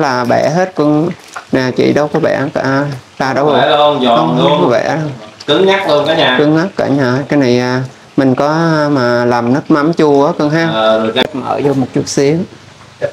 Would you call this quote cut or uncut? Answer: cut